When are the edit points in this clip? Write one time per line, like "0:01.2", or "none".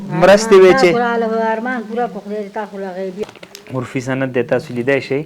0:03.2